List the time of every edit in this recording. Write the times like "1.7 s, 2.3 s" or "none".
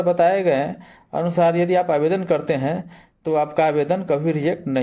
none